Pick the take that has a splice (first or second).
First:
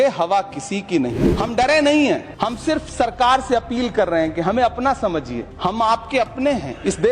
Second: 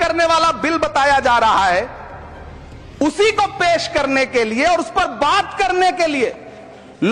first